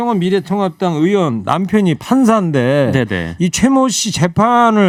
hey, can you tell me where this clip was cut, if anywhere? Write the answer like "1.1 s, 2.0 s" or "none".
none